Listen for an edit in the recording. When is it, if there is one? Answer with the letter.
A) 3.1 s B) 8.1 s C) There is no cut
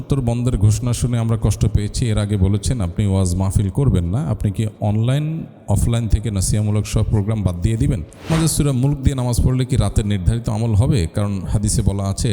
B